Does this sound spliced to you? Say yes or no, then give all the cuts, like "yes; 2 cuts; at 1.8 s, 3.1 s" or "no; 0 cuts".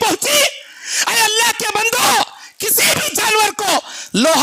no; 0 cuts